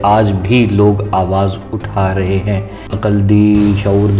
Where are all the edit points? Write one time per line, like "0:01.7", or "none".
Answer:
0:02.9